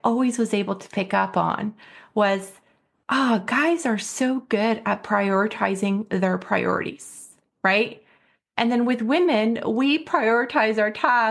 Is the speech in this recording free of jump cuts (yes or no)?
yes